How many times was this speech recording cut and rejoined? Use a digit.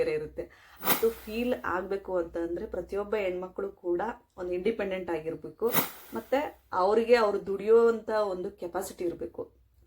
1